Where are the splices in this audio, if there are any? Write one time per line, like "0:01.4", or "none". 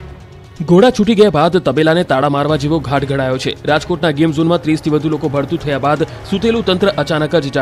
none